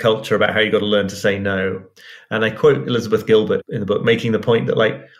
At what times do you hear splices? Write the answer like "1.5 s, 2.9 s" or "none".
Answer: 3.6 s